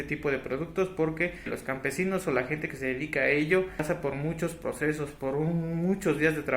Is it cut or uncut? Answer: cut